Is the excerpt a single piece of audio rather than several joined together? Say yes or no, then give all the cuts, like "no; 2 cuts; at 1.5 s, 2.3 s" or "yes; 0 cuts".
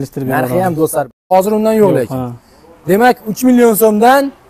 no; 1 cut; at 1.3 s